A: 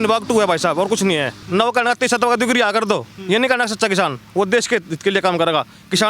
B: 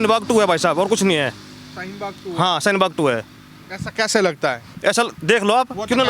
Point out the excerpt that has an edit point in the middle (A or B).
A